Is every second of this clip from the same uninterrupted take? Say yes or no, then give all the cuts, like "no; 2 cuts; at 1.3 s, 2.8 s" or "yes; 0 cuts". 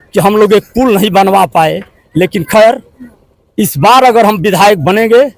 yes; 0 cuts